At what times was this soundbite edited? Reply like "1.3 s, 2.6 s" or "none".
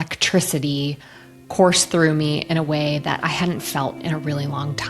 none